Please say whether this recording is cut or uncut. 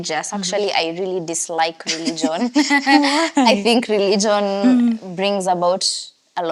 uncut